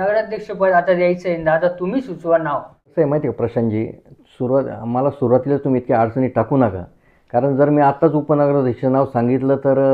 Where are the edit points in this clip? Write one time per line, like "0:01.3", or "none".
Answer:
0:02.8